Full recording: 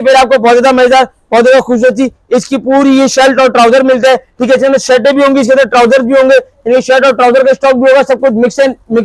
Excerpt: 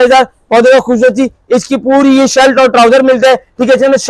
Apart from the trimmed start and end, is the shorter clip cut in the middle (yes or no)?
no